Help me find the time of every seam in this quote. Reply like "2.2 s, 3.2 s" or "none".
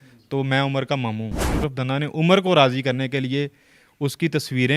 1.6 s